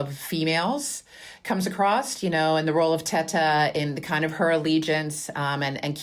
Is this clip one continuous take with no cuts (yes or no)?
yes